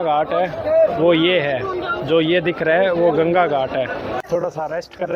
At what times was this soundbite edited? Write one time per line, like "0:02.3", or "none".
0:04.1